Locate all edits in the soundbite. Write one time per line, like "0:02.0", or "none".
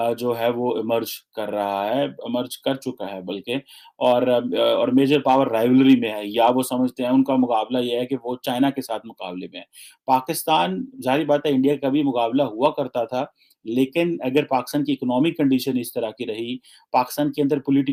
none